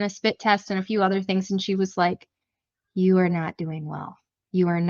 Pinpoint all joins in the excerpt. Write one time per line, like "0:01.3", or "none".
none